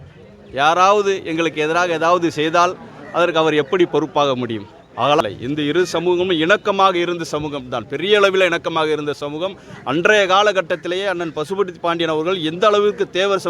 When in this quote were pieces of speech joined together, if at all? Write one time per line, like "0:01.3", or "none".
0:05.2